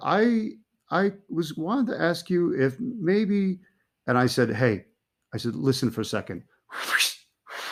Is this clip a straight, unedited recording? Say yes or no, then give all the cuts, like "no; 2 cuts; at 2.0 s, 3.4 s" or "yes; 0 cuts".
yes; 0 cuts